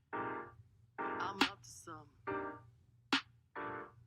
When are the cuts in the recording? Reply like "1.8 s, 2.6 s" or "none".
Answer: 1.2 s